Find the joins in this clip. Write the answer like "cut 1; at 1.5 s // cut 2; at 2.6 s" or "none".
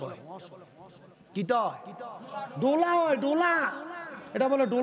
none